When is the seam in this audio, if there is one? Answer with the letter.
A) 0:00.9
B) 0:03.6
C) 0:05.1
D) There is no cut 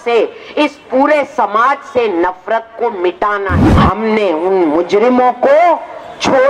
B